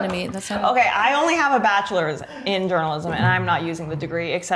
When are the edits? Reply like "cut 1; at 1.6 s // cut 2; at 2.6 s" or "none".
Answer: none